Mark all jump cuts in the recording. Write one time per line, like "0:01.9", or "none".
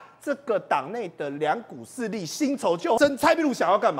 0:03.0